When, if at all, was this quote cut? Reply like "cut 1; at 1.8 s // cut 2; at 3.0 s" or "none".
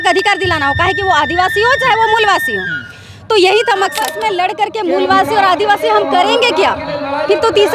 cut 1; at 4.1 s